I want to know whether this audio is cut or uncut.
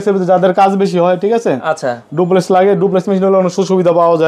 uncut